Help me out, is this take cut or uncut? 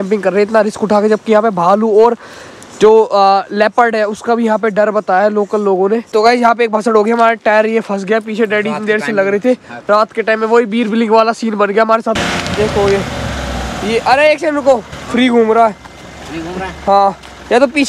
cut